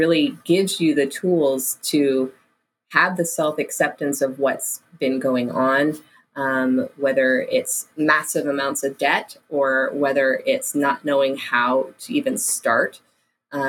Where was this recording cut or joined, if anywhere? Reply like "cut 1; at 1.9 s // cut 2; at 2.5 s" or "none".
none